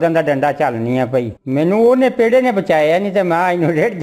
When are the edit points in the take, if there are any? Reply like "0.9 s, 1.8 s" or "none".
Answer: 1.4 s